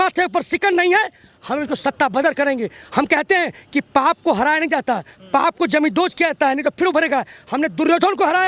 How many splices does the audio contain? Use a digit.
0